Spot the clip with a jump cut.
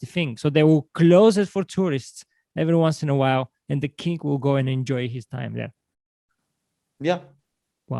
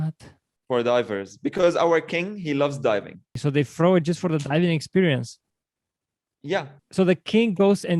second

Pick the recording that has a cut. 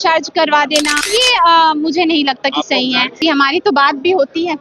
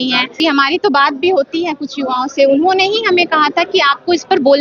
first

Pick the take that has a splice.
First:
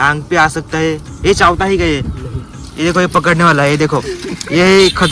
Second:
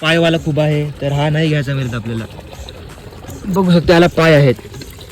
first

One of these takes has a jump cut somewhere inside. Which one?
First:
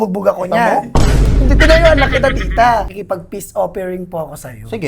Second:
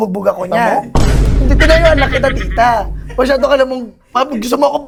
first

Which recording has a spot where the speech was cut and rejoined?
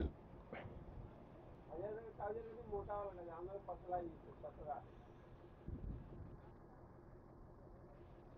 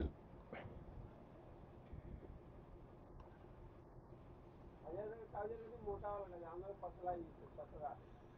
first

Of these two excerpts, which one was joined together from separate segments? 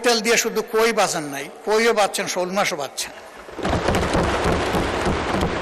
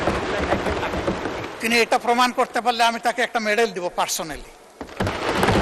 second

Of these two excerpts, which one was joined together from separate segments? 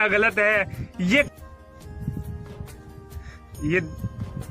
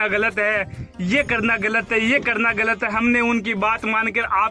first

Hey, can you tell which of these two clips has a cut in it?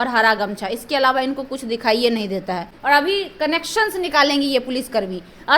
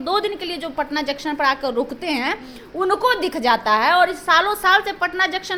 first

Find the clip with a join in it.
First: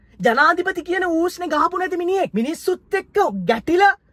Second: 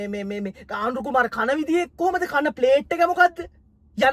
first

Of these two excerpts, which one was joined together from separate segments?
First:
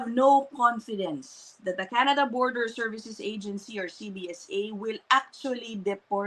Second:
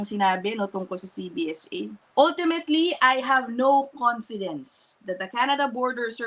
second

